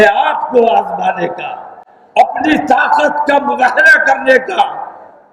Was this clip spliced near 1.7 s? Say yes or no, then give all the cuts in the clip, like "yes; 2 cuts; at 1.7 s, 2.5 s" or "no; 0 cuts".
no; 0 cuts